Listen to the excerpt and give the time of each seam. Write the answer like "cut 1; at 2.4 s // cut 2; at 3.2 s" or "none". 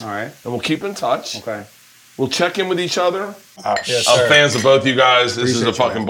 cut 1; at 3.5 s